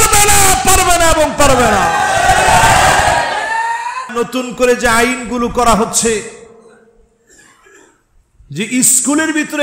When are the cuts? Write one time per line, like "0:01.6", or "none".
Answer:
0:04.1

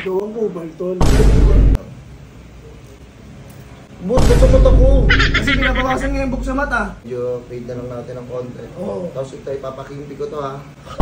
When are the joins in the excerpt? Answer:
0:01.8
0:07.0

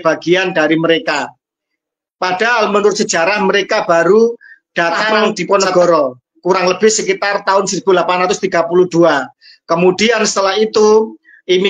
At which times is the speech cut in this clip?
0:05.4

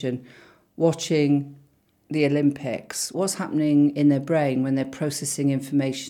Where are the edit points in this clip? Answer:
0:03.1

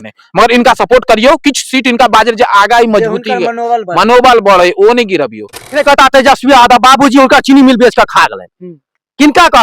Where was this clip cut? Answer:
0:05.7

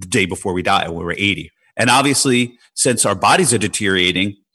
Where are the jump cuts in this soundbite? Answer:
0:01.5

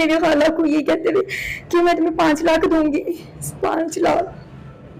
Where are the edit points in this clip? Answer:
none

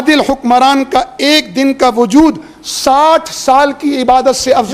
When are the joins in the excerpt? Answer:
none

